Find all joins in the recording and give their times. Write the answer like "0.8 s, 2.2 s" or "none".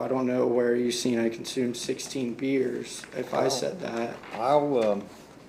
none